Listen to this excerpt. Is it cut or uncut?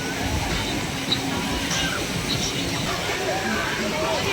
cut